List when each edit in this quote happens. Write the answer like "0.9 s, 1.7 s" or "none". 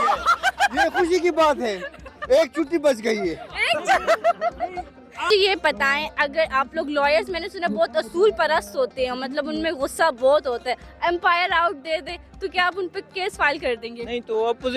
5.3 s